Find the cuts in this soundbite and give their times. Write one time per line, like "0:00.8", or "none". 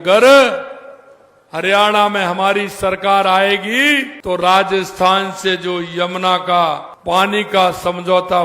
0:04.1
0:06.9